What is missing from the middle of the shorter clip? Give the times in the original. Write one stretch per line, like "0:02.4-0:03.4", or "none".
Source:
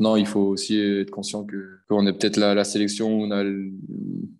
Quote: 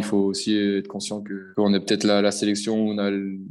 0:01.6-0:01.7